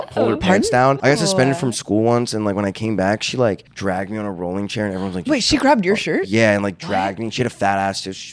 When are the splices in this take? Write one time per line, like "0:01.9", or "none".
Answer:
0:01.0
0:03.7